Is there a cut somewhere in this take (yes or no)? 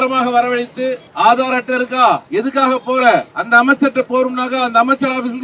yes